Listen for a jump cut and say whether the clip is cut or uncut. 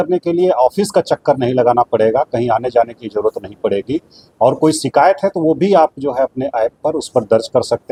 uncut